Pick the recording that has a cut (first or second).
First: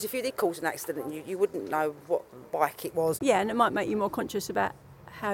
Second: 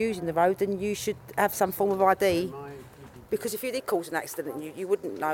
first